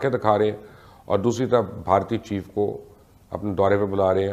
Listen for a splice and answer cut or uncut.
uncut